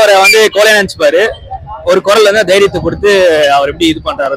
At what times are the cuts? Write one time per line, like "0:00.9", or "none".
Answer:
none